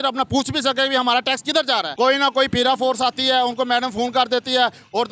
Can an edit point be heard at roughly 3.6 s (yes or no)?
no